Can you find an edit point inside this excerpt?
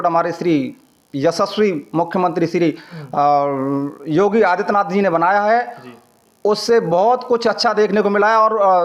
no; 0 cuts

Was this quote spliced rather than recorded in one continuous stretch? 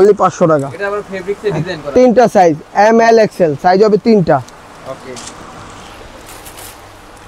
no; 0 cuts

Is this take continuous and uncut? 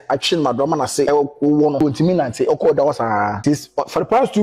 no; 3 cuts; at 1.1 s, 1.8 s, 3.4 s

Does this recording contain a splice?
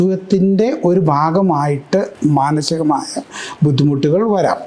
yes; 1 cut; at 2.1 s

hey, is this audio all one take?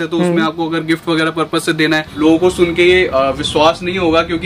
no; 1 cut; at 2.1 s

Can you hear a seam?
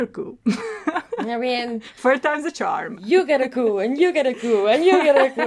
no; 0 cuts

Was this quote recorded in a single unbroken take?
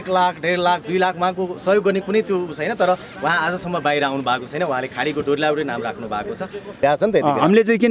no; 1 cut; at 6.8 s

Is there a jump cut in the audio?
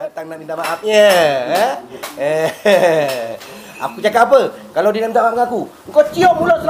no; 0 cuts

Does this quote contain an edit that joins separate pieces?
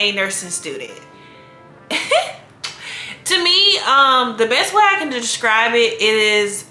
no; 0 cuts

